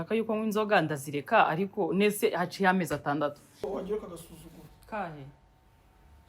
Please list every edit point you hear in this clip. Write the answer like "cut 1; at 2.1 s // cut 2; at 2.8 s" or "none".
cut 1; at 3.5 s